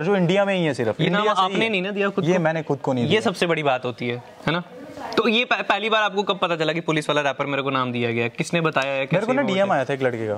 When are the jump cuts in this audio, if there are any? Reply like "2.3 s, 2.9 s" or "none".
none

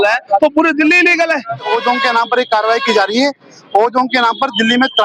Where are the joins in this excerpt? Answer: 1.7 s

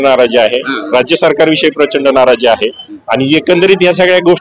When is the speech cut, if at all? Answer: none

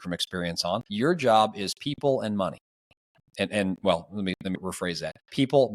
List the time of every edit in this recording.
0.9 s, 4.8 s

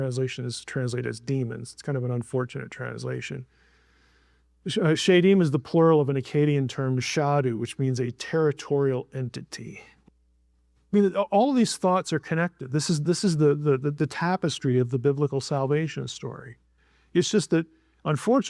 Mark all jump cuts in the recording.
9.9 s

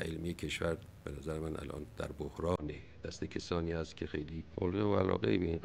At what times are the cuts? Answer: 4.5 s

